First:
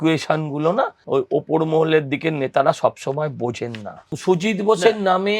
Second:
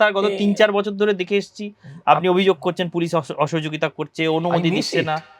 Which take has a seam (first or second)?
first